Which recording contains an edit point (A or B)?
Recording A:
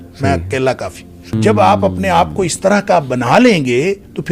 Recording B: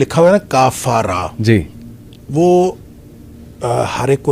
A